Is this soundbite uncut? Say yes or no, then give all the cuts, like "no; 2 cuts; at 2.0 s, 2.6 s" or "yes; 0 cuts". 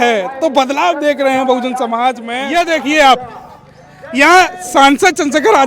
no; 1 cut; at 2.3 s